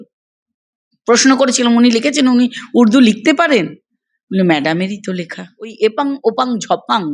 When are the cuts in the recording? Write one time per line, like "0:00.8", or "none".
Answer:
0:05.7